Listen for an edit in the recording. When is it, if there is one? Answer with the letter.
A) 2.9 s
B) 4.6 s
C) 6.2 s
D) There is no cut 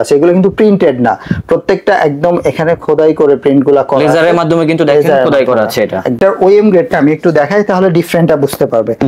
C